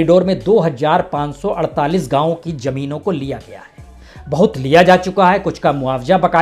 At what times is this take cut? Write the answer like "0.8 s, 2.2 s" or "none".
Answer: none